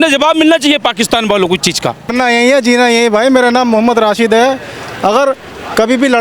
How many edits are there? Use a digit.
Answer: 1